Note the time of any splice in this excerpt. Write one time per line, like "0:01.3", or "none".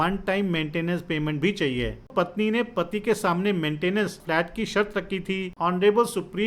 0:02.1
0:04.2
0:05.5